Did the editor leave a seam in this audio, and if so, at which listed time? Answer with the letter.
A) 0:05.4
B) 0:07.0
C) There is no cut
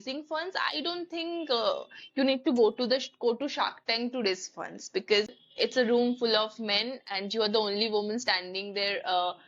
A